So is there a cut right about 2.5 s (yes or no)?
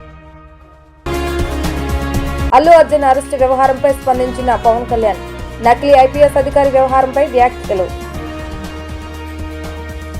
yes